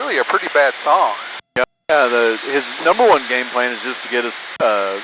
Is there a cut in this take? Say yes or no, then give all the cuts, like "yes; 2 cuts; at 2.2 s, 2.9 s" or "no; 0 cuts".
yes; 1 cut; at 1.6 s